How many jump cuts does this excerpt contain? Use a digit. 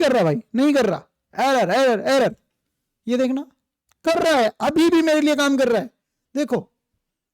0